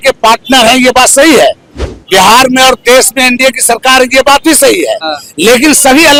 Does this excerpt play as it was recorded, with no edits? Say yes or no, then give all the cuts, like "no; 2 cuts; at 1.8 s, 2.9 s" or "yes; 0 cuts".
yes; 0 cuts